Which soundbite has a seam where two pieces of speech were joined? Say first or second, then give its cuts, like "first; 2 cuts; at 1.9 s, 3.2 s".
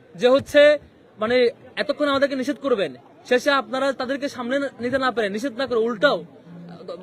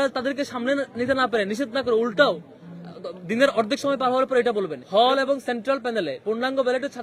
second; 1 cut; at 4.8 s